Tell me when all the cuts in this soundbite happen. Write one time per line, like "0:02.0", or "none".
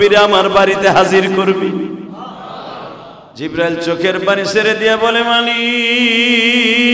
0:03.2